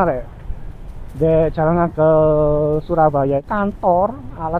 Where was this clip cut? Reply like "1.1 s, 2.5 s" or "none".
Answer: 3.4 s